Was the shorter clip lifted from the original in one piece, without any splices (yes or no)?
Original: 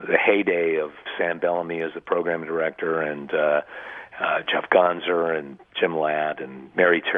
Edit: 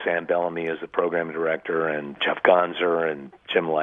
no